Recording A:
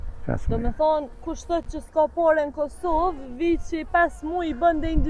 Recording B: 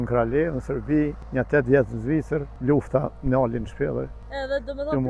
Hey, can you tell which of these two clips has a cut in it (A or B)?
B